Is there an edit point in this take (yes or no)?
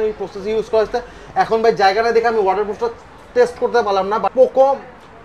yes